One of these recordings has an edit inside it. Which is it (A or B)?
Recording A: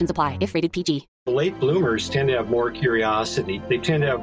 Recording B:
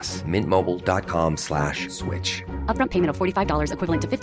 A